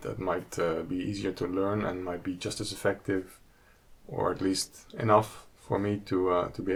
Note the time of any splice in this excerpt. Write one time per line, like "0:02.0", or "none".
none